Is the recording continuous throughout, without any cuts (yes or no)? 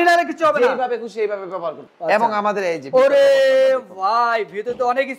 no